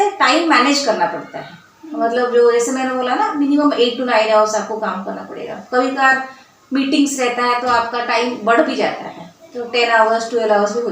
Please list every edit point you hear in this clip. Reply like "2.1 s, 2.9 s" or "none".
none